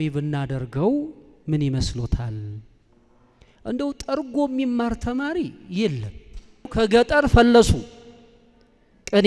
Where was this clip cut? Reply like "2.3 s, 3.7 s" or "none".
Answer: 6.6 s